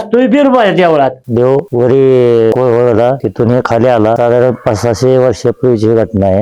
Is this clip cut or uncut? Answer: cut